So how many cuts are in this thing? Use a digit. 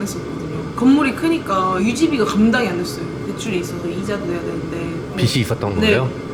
0